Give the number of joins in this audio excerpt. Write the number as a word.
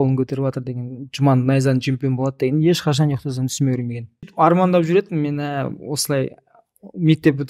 one